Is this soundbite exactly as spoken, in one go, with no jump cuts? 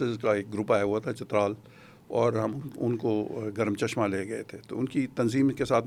yes; 0 cuts

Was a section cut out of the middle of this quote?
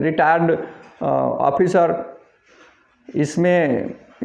no; 0 cuts

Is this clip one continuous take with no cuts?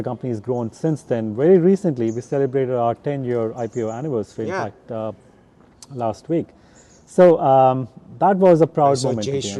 yes; 0 cuts

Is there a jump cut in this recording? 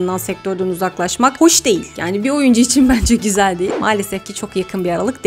yes; 1 cut; at 3.7 s

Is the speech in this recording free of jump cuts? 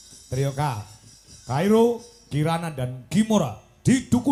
yes; 0 cuts

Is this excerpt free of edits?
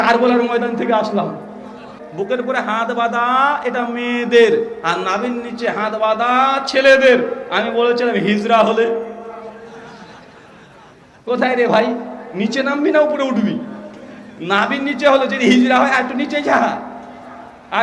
no; 1 cut; at 2.0 s

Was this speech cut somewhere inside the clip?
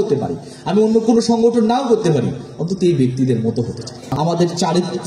yes; 1 cut; at 4.1 s

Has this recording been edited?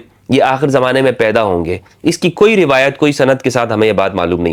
no; 0 cuts

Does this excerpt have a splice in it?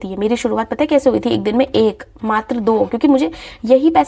no; 0 cuts

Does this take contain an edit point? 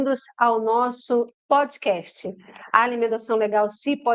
no; 0 cuts

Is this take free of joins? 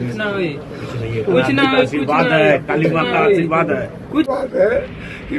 no; 1 cut; at 4.3 s

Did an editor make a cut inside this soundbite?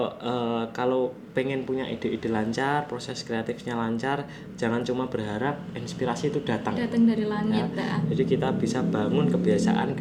no; 0 cuts

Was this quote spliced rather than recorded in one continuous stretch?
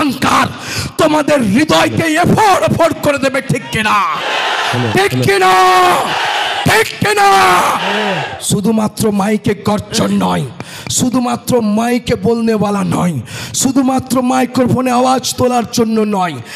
no; 0 cuts

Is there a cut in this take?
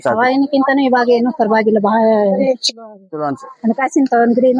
no; 0 cuts

